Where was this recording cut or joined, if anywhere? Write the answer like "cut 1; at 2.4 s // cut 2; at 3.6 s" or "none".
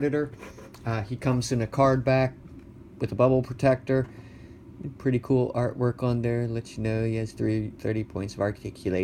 cut 1; at 7.8 s